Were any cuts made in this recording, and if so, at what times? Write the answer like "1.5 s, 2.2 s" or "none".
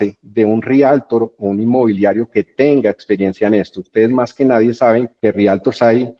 none